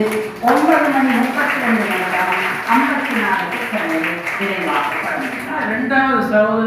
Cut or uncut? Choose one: cut